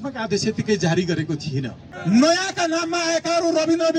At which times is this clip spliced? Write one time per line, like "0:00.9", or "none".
0:01.9